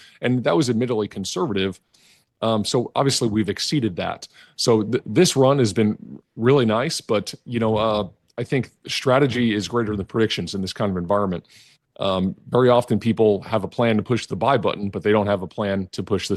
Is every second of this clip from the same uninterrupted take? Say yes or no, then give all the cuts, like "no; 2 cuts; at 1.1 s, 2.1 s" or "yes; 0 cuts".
yes; 0 cuts